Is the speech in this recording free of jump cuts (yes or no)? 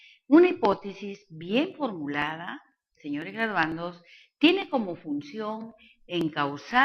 no